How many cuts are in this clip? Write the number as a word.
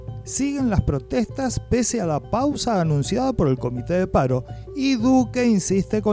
zero